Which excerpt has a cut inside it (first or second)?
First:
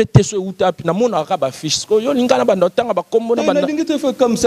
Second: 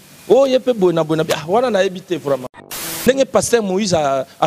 second